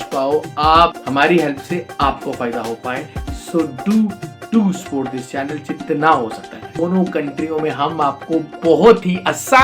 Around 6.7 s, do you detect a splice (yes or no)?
yes